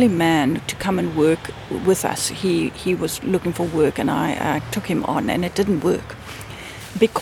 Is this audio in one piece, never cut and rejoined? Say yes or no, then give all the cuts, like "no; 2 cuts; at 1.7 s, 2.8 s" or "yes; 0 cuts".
yes; 0 cuts